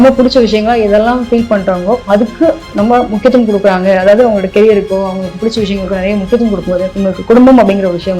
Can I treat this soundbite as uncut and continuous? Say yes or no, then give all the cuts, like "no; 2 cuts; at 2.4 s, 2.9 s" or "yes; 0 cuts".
yes; 0 cuts